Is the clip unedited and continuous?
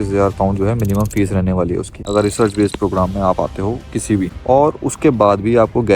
no; 2 cuts; at 1.9 s, 4.4 s

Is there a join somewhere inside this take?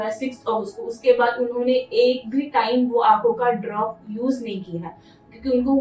no; 0 cuts

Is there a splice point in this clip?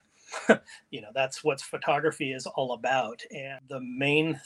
yes; 1 cut; at 3.5 s

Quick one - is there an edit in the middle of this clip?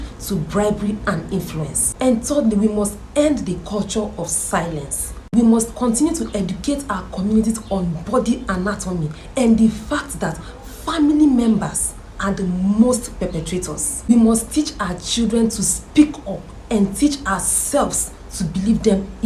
no; 0 cuts

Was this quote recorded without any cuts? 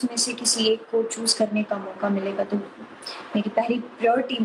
yes; 0 cuts

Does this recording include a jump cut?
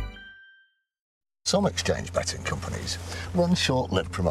yes; 1 cut; at 1.1 s

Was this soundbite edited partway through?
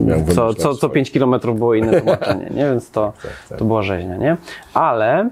no; 0 cuts

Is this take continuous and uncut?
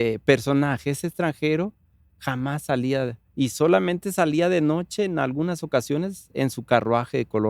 yes; 0 cuts

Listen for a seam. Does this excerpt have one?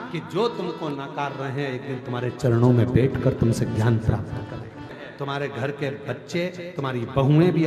yes; 1 cut; at 5.0 s

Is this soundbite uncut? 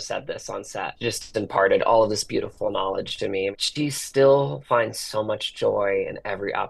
no; 2 cuts; at 0.9 s, 3.6 s

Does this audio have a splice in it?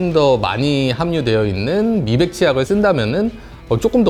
no; 0 cuts

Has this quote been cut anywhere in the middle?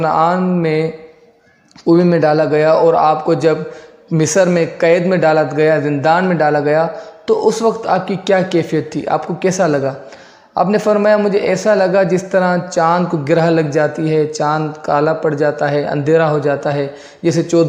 no; 0 cuts

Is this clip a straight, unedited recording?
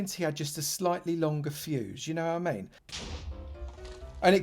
no; 1 cut; at 2.8 s

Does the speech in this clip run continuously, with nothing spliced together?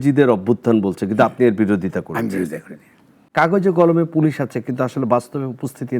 no; 1 cut; at 3.3 s

